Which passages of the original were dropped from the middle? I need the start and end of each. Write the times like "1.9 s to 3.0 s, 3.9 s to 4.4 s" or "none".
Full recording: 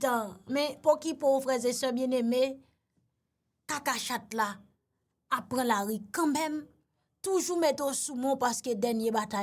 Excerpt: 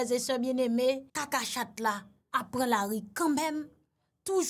2.6 s to 3.6 s, 4.7 s to 5.1 s